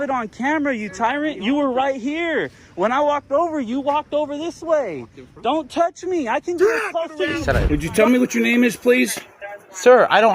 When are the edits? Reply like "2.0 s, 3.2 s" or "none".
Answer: 7.4 s